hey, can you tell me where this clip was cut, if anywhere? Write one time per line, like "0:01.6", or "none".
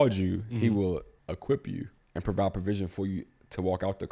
0:00.9
0:02.0